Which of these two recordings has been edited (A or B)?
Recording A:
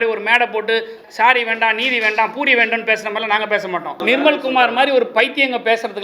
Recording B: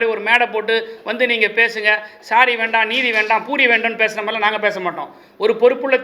A